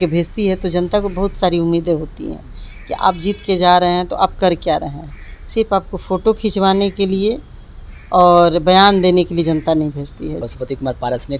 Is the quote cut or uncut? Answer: cut